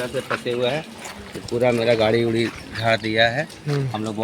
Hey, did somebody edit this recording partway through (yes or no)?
no